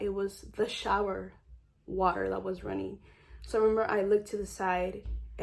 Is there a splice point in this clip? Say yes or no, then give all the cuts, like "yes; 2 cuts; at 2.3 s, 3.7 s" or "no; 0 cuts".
no; 0 cuts